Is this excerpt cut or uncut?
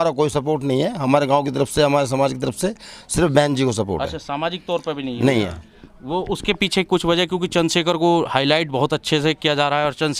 uncut